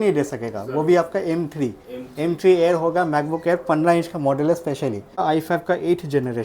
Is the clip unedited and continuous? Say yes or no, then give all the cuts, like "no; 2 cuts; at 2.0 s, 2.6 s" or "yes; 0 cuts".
no; 1 cut; at 5.2 s